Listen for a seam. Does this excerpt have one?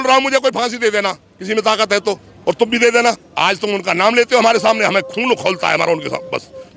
yes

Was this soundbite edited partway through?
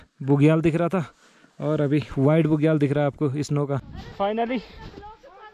yes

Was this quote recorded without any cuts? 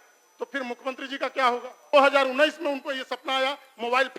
no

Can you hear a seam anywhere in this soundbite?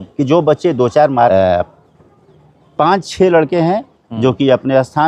yes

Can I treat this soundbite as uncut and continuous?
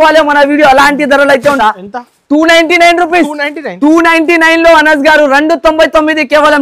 no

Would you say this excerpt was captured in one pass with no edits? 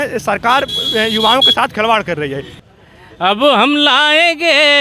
no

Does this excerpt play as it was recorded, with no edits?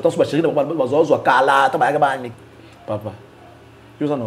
no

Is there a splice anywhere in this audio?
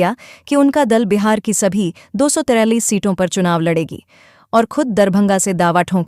no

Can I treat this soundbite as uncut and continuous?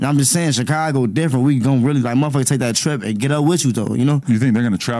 yes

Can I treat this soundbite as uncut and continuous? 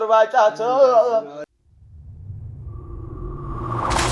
yes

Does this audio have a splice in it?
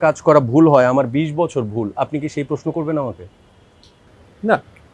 no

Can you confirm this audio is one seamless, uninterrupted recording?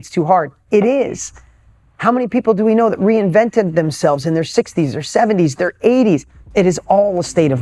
no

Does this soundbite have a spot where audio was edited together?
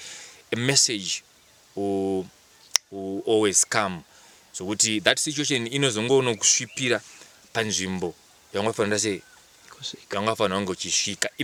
no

